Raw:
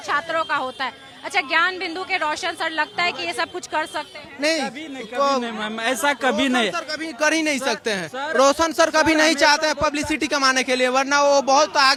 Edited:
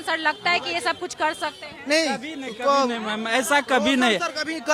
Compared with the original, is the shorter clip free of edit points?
yes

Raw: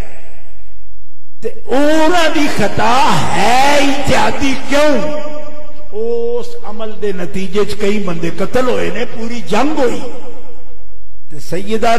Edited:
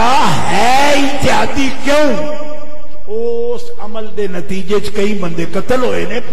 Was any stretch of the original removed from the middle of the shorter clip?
no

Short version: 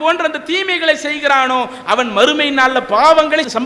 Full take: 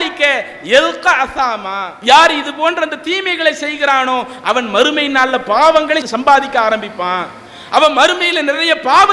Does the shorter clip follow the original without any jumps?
yes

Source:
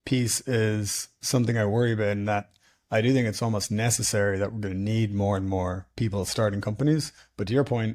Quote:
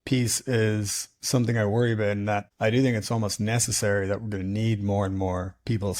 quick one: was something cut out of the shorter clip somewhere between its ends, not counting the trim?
yes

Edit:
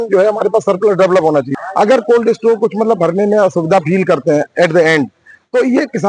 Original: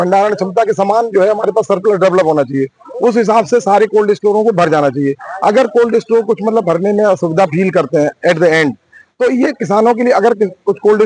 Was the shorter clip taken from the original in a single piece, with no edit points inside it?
no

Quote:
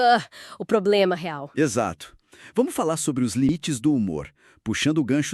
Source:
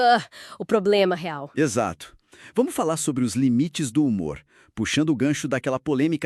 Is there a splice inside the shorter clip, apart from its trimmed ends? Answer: yes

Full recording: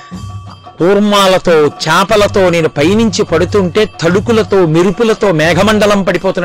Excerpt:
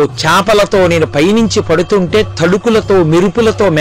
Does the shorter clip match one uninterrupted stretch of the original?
yes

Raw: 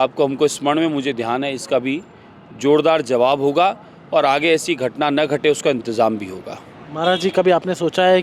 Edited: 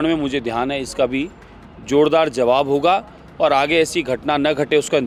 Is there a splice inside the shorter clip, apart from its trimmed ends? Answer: no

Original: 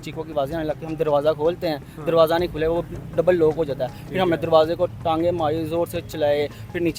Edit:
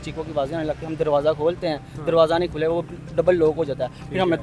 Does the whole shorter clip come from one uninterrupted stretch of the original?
yes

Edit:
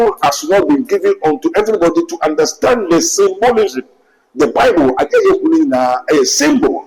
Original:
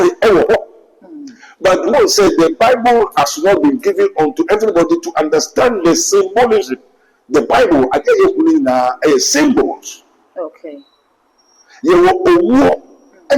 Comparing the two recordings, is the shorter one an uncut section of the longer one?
yes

